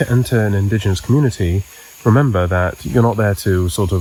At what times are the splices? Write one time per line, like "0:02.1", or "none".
none

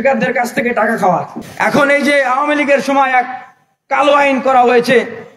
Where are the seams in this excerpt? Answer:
0:01.4

